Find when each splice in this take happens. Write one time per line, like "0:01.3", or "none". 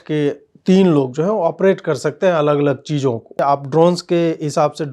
0:03.4

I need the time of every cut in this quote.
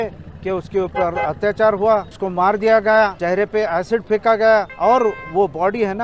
0:02.1
0:03.2
0:04.7

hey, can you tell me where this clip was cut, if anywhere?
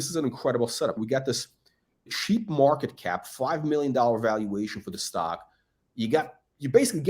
0:01.0

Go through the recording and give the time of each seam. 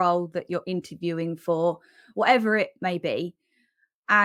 none

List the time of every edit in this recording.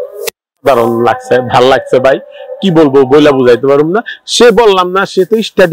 none

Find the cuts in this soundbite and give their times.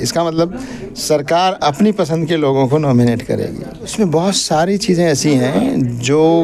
0:03.9

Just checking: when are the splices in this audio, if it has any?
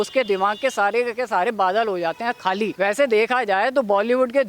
0:02.7

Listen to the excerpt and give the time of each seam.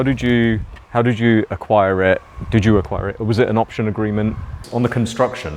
0:04.6

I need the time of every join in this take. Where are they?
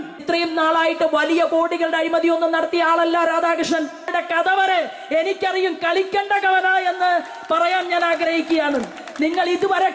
0:04.1

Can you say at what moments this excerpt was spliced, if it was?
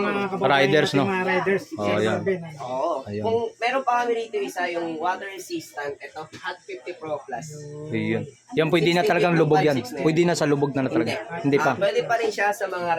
none

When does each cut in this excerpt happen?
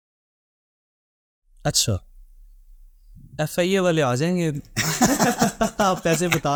none

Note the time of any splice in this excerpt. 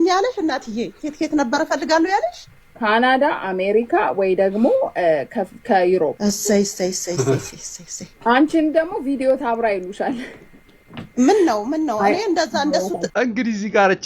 none

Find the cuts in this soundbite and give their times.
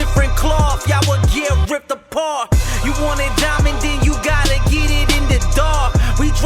none

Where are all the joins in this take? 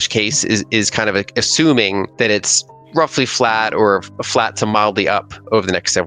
0:02.1

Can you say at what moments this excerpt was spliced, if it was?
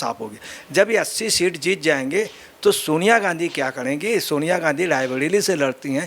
none

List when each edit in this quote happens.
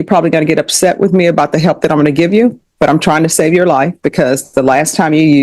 none

